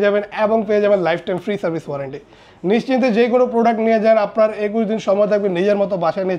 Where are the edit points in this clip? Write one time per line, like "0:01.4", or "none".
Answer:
none